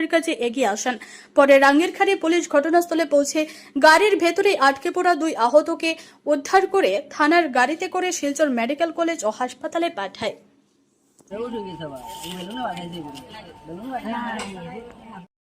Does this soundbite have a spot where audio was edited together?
yes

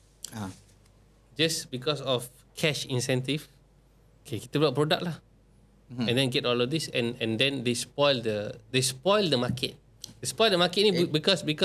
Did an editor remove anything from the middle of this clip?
no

